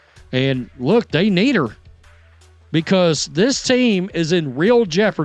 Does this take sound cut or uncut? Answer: uncut